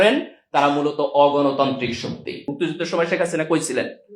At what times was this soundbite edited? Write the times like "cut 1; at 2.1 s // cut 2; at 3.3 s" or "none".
cut 1; at 2.4 s